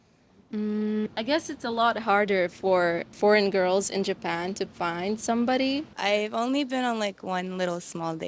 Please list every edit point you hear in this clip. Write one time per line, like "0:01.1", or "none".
0:01.1
0:05.9